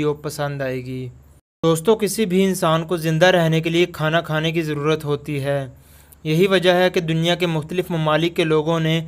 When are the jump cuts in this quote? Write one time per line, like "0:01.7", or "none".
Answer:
0:01.6